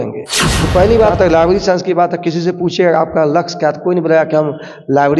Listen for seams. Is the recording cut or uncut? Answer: cut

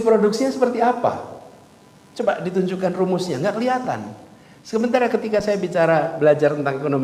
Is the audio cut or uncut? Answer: uncut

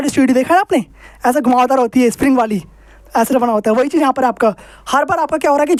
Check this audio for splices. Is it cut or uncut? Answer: uncut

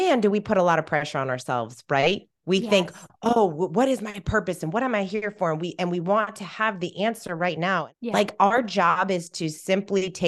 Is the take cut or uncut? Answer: cut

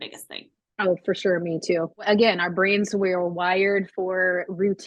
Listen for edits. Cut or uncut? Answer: cut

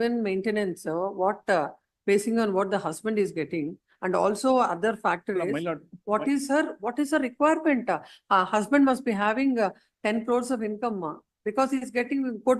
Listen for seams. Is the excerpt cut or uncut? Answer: uncut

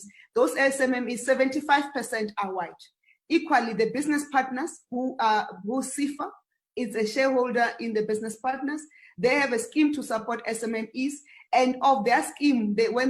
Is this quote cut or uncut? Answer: cut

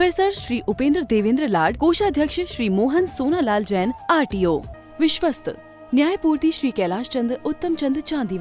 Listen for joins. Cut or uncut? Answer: cut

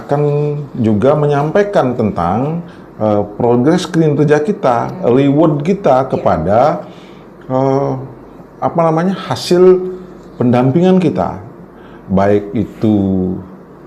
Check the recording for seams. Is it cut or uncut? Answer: uncut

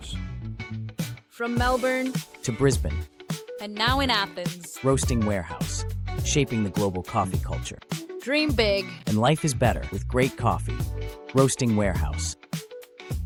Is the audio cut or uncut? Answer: uncut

